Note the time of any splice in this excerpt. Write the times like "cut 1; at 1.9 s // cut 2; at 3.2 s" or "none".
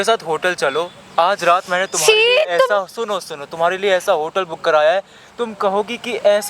none

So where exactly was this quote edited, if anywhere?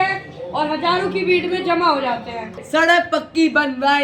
cut 1; at 2.6 s

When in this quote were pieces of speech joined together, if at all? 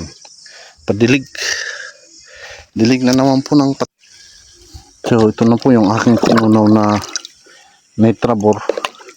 cut 1; at 3.9 s

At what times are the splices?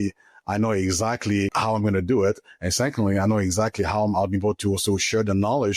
cut 1; at 1.5 s

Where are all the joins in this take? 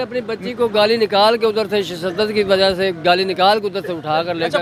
none

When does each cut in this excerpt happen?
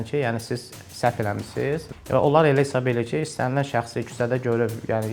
cut 1; at 1.9 s

